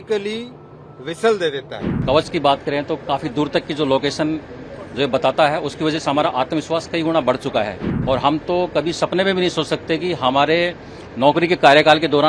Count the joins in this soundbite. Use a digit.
2